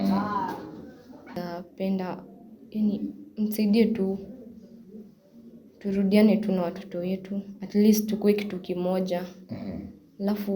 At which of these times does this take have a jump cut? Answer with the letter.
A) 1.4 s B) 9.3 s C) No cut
A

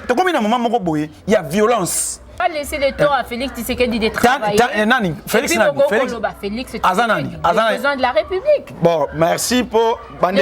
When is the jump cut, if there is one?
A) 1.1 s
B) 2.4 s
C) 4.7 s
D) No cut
B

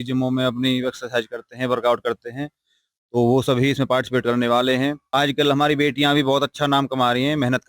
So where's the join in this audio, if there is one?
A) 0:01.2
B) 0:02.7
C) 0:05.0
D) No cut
C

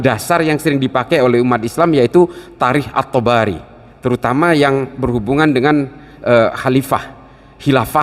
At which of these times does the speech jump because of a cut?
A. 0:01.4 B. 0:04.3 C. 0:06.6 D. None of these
D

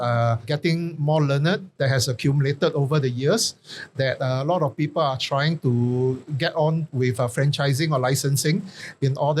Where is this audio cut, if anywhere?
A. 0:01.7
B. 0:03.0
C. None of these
A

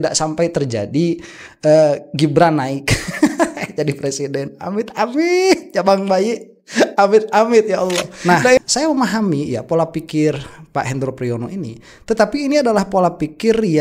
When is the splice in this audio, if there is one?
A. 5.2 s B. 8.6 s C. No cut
B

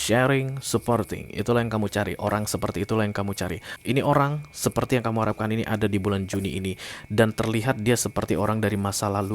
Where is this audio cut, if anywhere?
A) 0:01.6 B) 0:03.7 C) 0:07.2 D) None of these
B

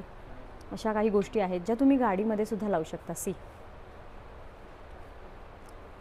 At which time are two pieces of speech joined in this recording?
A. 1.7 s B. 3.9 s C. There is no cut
C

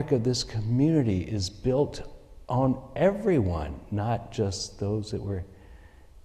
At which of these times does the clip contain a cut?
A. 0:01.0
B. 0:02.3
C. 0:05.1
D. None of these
D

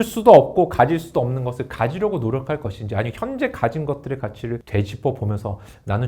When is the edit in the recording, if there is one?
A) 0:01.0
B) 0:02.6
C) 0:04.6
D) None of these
C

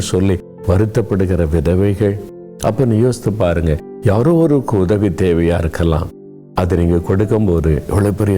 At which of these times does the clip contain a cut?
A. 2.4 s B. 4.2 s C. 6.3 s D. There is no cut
A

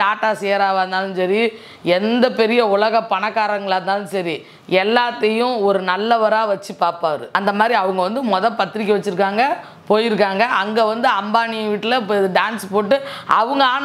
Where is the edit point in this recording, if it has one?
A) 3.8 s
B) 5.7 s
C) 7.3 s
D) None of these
C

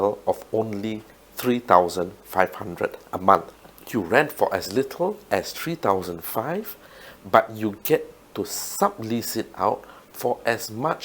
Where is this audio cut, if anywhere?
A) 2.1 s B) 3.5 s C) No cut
B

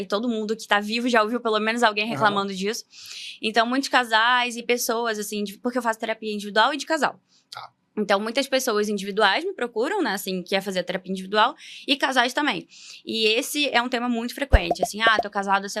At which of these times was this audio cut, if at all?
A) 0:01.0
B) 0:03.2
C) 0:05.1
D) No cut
D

